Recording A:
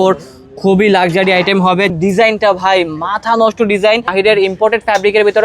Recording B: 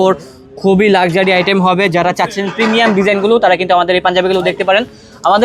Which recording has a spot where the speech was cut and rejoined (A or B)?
A